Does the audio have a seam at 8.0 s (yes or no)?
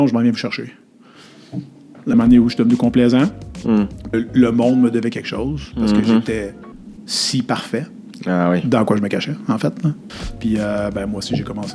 no